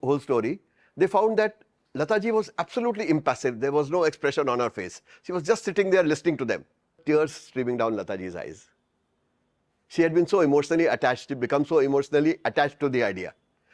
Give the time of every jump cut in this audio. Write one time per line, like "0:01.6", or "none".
0:07.0